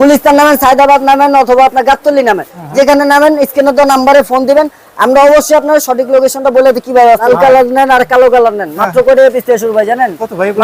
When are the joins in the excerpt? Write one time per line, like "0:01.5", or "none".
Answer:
0:07.2